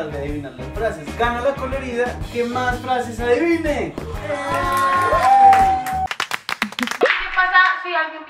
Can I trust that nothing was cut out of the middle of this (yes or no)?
yes